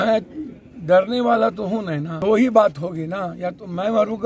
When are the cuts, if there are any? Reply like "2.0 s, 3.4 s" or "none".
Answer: 2.1 s

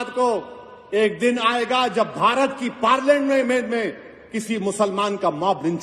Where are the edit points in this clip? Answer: none

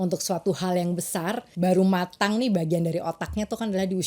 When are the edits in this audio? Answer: 1.6 s

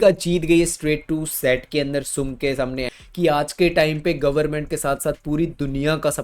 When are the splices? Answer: 3.0 s

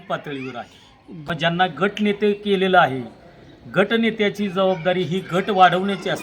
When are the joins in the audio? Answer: 1.2 s

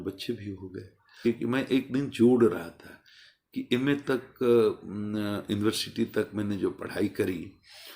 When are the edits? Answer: 1.3 s

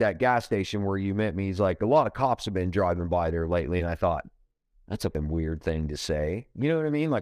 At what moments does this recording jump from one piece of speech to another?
5.1 s

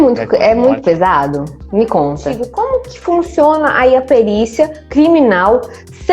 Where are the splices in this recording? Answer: 2.5 s

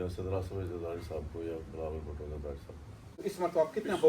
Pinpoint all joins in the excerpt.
3.1 s

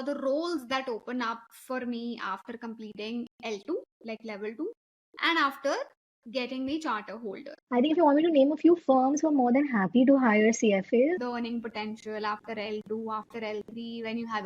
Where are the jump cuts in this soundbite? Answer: 7.5 s, 11.2 s

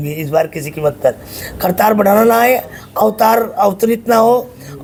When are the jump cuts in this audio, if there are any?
none

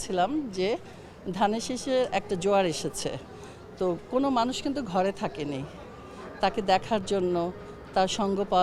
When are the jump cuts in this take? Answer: none

